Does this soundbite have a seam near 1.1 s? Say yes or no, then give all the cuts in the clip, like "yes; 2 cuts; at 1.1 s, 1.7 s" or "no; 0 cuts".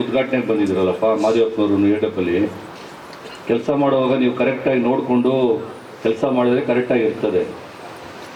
no; 0 cuts